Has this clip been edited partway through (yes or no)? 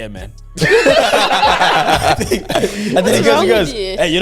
no